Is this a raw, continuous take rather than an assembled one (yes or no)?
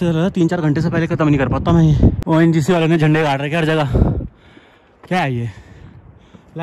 yes